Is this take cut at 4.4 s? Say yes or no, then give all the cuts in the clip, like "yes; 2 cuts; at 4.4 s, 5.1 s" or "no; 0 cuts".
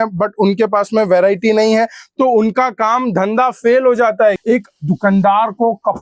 yes; 1 cut; at 4.4 s